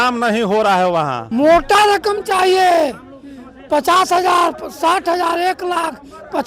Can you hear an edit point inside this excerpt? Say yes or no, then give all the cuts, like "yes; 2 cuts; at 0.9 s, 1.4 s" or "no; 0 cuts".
yes; 1 cut; at 1.2 s